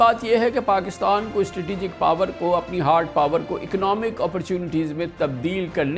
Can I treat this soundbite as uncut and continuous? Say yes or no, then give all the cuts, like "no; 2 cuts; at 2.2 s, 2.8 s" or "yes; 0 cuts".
yes; 0 cuts